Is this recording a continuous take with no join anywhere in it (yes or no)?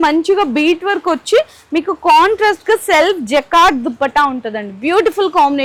yes